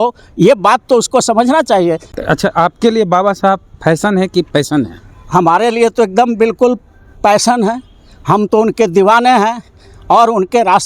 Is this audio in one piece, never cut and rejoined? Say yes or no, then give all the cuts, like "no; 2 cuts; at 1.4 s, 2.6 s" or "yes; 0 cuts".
no; 1 cut; at 2.1 s